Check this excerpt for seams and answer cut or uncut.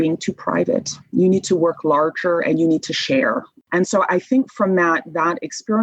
cut